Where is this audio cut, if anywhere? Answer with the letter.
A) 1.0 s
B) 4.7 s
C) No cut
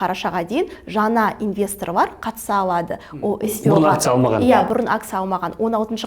C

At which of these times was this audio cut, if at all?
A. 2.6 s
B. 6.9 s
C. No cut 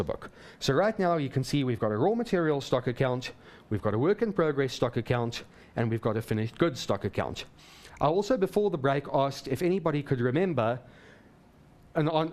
A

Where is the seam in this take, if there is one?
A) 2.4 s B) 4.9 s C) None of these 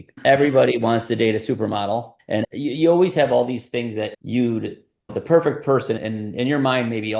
A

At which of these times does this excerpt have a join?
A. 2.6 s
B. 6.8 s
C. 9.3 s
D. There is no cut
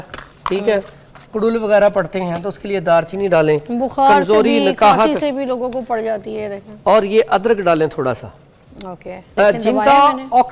C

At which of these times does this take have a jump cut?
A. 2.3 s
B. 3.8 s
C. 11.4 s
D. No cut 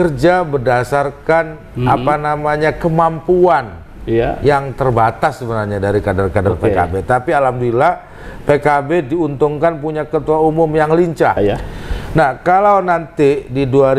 C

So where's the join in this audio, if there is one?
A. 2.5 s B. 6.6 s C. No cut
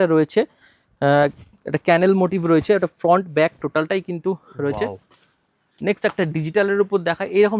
C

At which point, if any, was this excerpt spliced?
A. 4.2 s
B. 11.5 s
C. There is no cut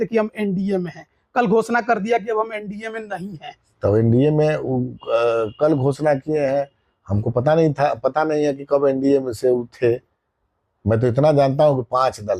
C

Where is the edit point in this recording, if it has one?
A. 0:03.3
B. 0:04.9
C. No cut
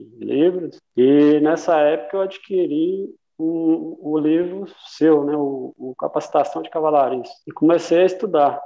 C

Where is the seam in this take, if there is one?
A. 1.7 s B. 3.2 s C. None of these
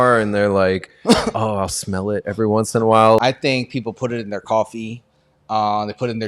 B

